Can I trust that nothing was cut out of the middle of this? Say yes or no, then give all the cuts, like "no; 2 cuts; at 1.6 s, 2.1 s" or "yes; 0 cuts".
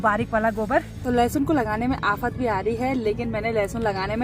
no; 1 cut; at 1.0 s